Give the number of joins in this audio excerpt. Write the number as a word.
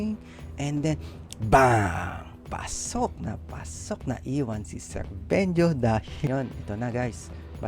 one